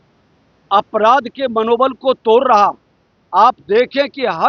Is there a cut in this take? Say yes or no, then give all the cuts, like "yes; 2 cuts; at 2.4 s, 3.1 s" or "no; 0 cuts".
no; 0 cuts